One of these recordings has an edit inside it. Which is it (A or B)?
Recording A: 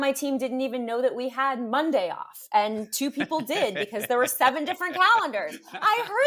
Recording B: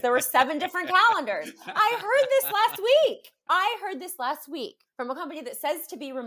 B